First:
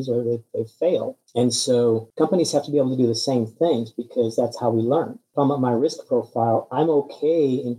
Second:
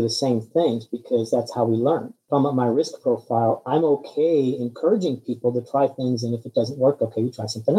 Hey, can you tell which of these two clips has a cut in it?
first; 2 cuts; at 1.2 s, 2.1 s

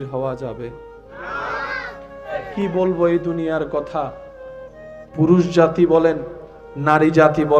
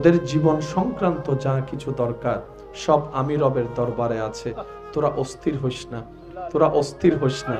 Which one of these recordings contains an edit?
first; 1 cut; at 2.5 s

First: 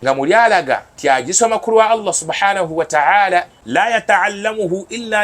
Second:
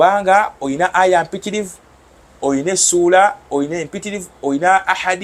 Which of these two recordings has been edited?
first; 2 cuts; at 0.9 s, 3.9 s

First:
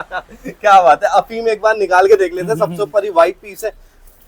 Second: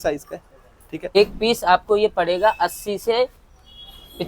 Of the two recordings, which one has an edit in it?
second; 1 cut; at 1.2 s

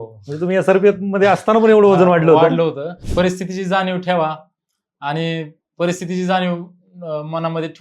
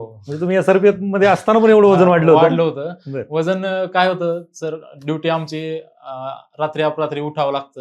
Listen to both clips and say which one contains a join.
first; 1 cut; at 2.9 s

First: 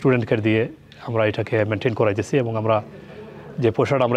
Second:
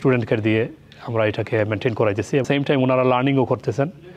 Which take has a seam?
second; 1 cut; at 2.4 s

